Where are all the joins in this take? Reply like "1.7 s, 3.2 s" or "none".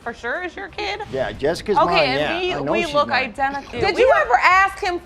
none